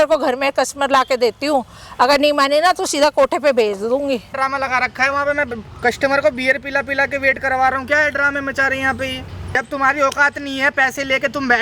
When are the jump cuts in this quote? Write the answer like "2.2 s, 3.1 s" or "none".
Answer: 4.4 s, 9.6 s